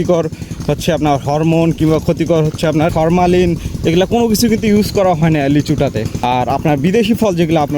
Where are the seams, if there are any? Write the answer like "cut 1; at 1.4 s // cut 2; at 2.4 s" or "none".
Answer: cut 1; at 2.9 s // cut 2; at 6.2 s